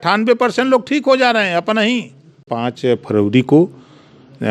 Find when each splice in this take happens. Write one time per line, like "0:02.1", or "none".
0:02.5